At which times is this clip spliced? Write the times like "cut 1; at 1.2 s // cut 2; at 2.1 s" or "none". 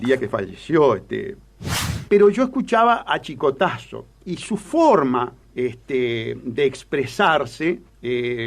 cut 1; at 1.9 s